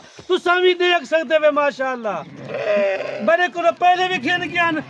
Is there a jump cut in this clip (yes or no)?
no